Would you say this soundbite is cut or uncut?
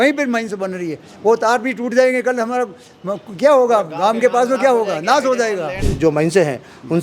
cut